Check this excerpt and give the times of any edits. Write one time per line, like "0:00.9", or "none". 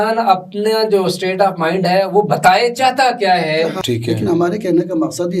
0:03.8